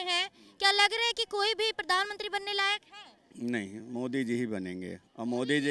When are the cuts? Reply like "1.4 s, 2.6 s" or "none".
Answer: none